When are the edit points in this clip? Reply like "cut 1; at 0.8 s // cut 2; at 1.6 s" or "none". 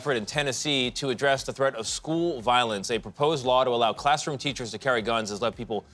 none